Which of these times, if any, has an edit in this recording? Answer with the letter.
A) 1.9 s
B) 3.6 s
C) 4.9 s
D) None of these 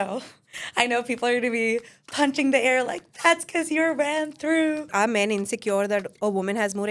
C